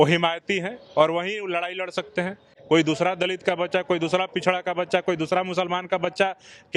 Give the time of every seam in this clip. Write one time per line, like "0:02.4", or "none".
none